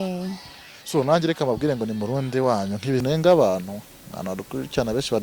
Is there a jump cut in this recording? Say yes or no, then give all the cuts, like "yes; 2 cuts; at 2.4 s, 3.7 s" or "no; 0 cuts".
yes; 1 cut; at 3.0 s